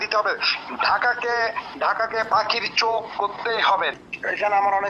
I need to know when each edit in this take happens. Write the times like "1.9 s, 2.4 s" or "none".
4.0 s

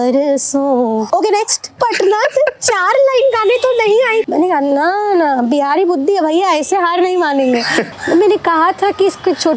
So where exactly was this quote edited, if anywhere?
1.5 s, 4.3 s, 7.9 s

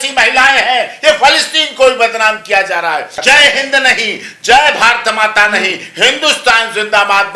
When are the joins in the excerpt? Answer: 3.2 s

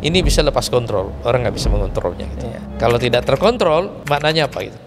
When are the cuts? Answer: 2.6 s, 4.0 s

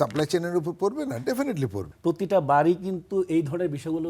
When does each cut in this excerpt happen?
1.8 s

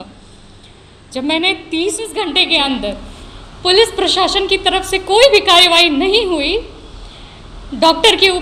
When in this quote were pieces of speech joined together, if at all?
2.2 s

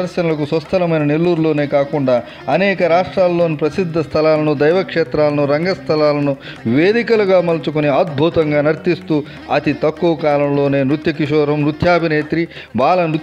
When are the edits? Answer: none

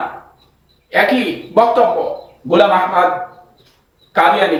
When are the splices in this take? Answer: none

